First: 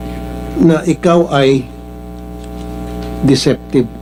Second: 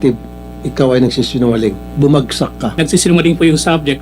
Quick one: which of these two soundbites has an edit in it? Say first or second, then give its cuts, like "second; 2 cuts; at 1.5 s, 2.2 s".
second; 1 cut; at 2.8 s